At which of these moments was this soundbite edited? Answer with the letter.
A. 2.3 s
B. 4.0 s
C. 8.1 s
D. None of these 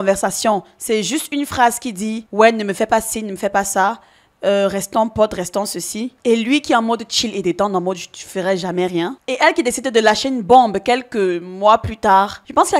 D